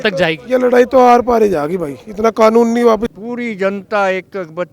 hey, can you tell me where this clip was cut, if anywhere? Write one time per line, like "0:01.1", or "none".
0:03.1